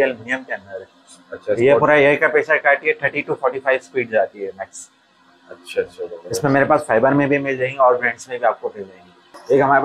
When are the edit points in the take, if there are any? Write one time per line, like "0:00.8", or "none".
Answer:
none